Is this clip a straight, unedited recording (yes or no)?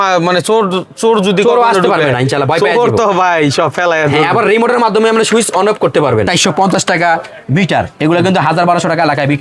no